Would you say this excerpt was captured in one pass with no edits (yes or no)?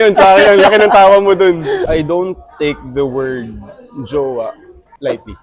no